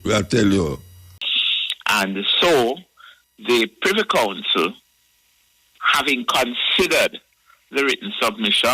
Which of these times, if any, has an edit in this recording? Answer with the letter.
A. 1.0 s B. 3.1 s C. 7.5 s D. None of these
A